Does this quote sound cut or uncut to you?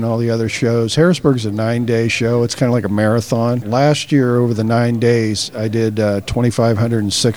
cut